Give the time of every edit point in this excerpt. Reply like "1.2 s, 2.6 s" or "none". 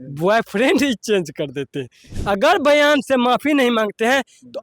2.1 s